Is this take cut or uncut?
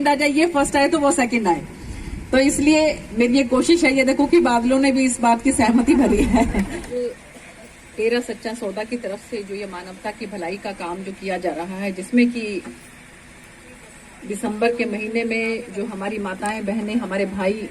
cut